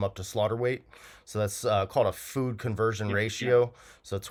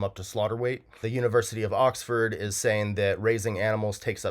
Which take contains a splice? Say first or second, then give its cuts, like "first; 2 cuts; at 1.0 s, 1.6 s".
second; 1 cut; at 1.0 s